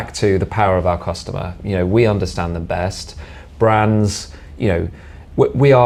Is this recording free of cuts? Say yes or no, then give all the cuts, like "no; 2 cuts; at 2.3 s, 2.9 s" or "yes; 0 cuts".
yes; 0 cuts